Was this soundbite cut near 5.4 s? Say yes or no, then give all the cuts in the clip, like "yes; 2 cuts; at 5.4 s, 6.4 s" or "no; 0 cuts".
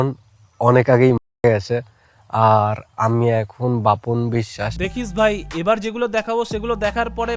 no; 0 cuts